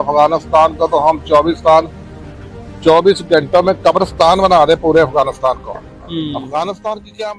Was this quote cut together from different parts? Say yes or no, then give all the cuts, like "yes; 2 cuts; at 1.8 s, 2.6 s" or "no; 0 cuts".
no; 0 cuts